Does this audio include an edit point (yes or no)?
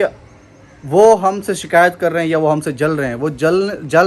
no